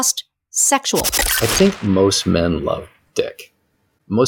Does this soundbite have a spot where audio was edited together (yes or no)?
yes